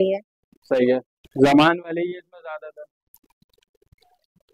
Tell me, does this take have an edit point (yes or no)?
no